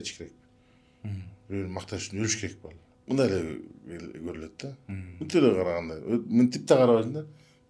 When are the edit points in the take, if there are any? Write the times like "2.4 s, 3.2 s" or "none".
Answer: 2.9 s